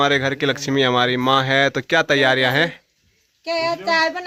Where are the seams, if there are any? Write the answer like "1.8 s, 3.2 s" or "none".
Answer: none